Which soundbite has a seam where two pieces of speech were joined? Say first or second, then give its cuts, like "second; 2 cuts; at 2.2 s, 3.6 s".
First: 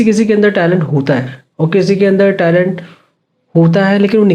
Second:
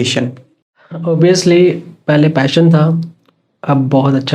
second; 1 cut; at 1.0 s